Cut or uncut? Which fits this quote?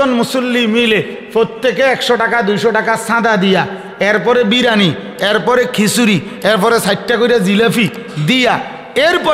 uncut